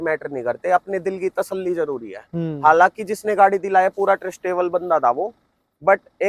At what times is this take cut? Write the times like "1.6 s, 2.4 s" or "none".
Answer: none